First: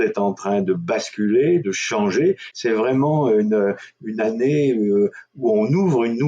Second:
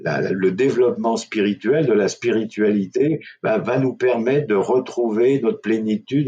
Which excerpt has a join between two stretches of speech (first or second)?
first